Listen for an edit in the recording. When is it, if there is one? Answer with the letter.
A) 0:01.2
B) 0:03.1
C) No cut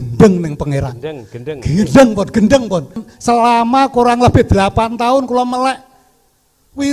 B